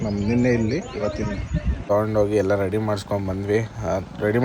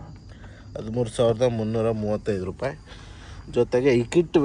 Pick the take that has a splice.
first; 1 cut; at 1.9 s

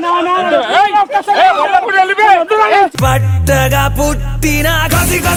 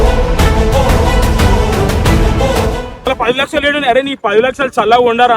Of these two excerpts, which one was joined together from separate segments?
second; 1 cut; at 3.1 s

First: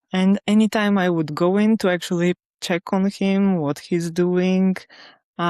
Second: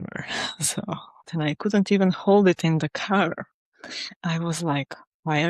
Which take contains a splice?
second; 1 cut; at 1.3 s

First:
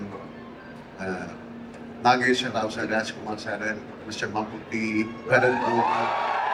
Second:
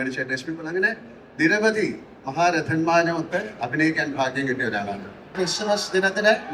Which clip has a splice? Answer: second; 1 cut; at 5.3 s

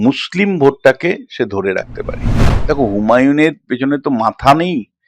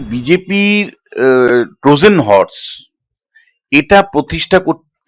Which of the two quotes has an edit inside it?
first; 1 cut; at 2.5 s

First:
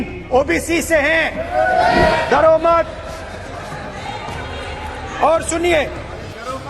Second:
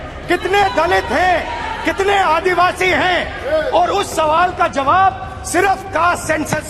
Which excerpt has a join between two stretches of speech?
first; 1 cut; at 2.2 s

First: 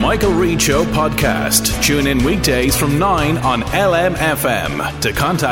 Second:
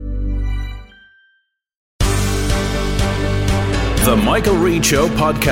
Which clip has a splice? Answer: second; 1 cut; at 1.9 s

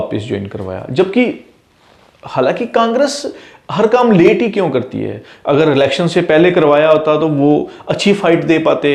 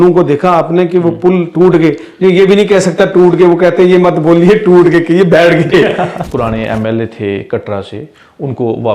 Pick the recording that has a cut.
second; 1 cut; at 6.3 s

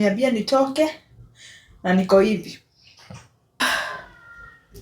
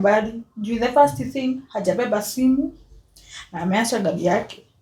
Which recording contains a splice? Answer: first; 1 cut; at 3.6 s

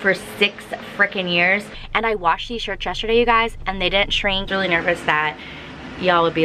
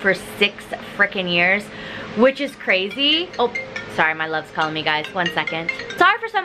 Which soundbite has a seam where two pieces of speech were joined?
first; 2 cuts; at 1.8 s, 4.5 s

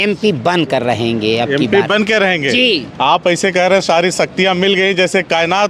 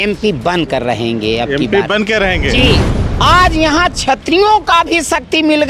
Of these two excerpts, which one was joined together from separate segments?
second; 1 cut; at 2.9 s

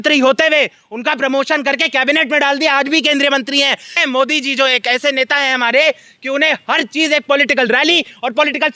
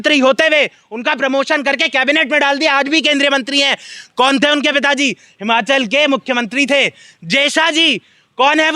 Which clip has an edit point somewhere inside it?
first; 1 cut; at 4.0 s

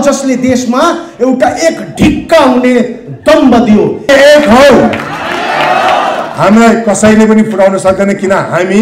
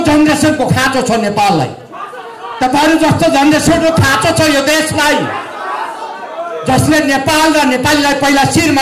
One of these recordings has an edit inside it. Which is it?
first; 1 cut; at 4.0 s

